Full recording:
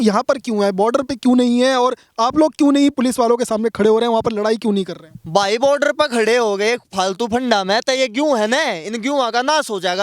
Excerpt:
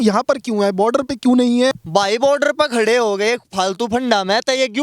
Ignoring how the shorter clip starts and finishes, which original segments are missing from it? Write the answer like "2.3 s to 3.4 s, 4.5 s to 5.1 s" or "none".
1.7 s to 5.1 s